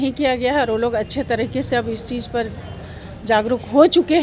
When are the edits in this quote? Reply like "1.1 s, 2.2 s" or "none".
none